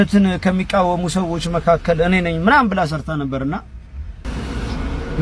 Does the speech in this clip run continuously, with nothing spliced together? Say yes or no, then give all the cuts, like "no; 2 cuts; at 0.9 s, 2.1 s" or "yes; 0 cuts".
no; 1 cut; at 4.2 s